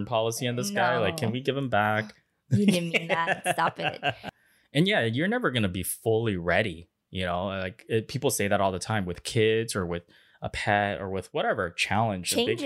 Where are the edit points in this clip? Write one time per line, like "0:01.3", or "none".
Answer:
0:04.3